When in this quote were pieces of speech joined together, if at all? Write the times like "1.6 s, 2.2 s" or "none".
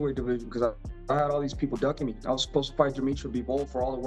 none